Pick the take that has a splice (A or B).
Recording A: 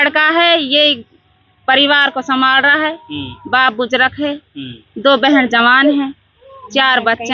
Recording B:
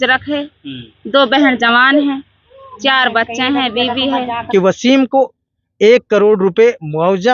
B